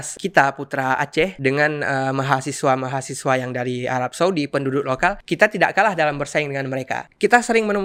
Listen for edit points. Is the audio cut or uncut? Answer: uncut